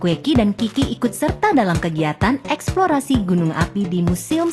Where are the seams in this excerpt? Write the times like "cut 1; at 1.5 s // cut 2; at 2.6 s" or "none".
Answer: none